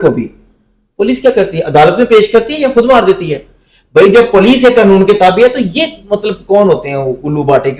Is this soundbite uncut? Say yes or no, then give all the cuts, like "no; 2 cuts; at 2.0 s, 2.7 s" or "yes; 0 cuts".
yes; 0 cuts